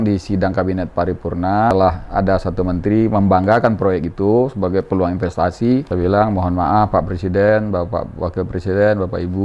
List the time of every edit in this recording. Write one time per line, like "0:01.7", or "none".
0:01.7
0:05.9

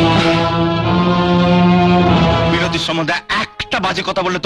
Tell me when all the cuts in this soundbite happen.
0:02.5

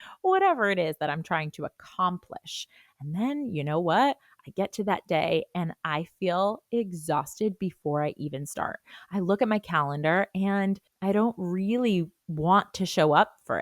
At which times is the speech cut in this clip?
0:10.9
0:12.2

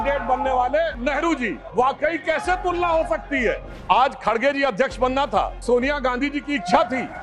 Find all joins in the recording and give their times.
0:01.4
0:03.7
0:05.6

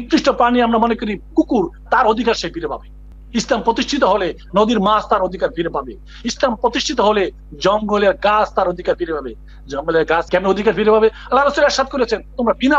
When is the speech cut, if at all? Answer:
0:10.3

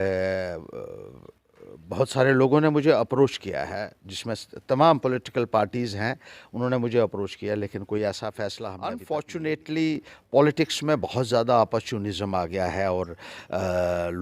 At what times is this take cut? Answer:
0:08.9

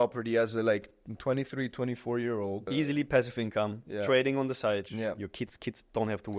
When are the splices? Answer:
0:02.7
0:04.9

